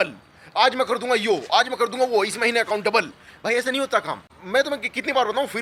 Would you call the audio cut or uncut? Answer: uncut